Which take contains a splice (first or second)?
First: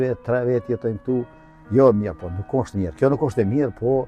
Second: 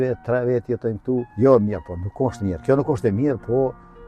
second